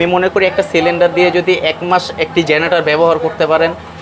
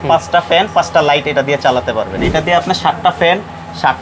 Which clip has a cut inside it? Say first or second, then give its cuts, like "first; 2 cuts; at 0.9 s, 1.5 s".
second; 1 cut; at 2.2 s